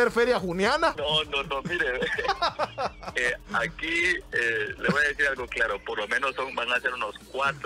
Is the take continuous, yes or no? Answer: no